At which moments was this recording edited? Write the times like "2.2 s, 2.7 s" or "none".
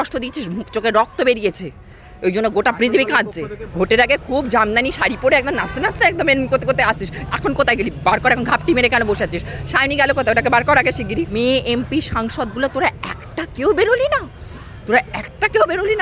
3.6 s, 11.3 s